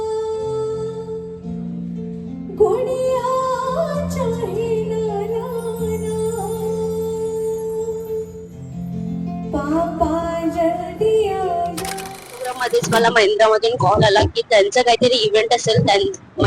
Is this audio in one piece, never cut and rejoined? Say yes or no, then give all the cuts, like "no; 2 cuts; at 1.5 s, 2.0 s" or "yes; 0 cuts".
no; 1 cut; at 12.5 s